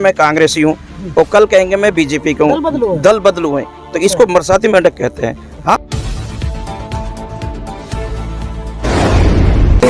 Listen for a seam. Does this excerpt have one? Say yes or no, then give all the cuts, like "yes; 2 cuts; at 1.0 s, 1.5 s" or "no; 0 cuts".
yes; 1 cut; at 5.8 s